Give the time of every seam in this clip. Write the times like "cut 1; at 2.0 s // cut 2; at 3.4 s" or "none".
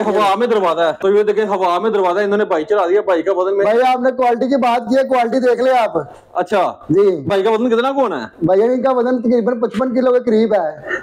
none